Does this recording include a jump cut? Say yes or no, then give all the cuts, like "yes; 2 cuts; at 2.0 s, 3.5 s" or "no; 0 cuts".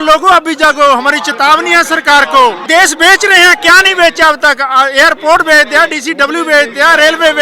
yes; 1 cut; at 2.7 s